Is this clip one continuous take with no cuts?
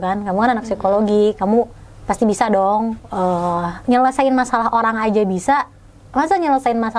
yes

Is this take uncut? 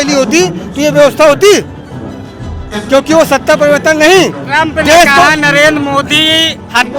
yes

